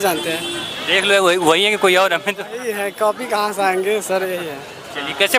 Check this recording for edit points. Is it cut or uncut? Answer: uncut